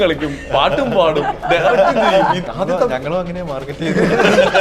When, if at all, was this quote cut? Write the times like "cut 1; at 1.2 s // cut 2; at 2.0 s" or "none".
cut 1; at 2.4 s